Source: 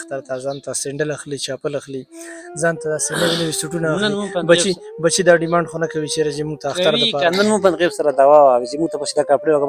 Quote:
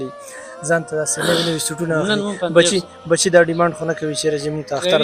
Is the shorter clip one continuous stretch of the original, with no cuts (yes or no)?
yes